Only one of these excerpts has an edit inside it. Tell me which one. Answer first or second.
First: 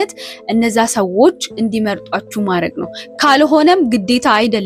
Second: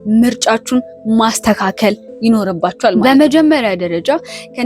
second